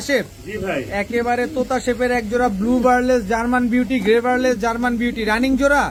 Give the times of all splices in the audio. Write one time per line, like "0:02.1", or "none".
none